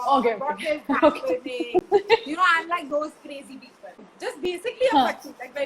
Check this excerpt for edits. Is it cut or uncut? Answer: cut